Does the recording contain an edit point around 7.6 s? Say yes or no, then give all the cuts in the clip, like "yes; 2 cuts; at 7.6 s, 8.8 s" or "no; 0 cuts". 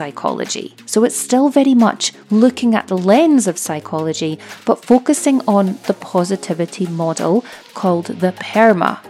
yes; 1 cut; at 7.6 s